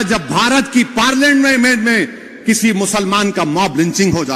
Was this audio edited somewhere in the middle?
no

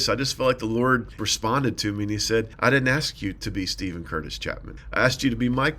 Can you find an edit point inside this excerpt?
yes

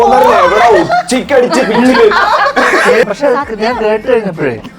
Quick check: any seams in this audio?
yes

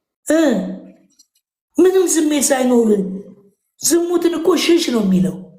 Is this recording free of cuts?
yes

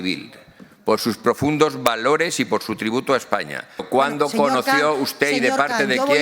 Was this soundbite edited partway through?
yes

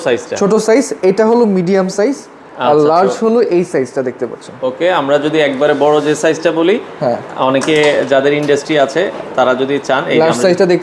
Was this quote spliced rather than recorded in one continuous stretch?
no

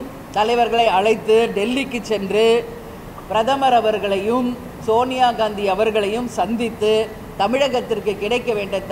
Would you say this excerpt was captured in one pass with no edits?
yes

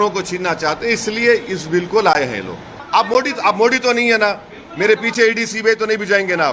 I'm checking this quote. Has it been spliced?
yes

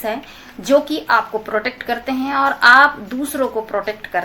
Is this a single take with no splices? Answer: yes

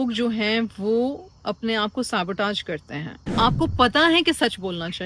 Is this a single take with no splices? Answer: no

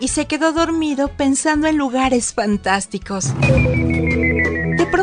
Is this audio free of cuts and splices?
yes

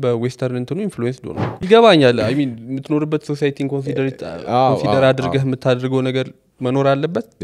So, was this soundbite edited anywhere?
yes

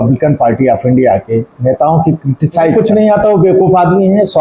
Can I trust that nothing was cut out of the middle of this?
no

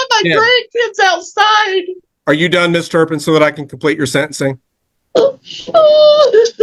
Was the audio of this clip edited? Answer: yes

